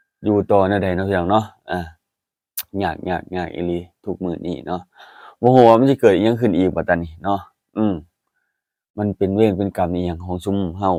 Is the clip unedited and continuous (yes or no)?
yes